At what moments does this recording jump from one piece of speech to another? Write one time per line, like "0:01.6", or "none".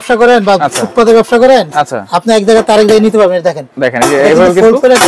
none